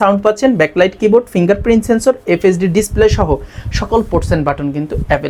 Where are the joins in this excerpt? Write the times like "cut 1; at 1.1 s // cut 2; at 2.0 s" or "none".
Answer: none